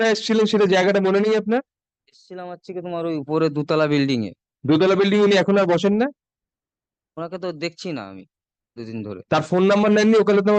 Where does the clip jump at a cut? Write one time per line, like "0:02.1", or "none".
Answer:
none